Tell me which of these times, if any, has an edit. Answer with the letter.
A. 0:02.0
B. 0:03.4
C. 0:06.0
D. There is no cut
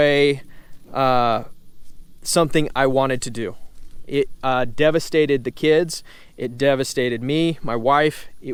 D